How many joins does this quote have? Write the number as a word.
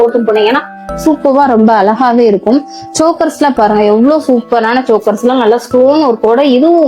zero